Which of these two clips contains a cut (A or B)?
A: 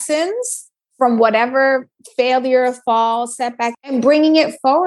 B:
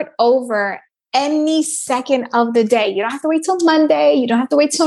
A